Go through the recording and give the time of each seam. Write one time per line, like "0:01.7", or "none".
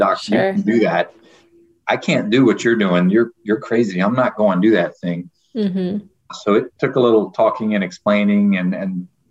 0:06.8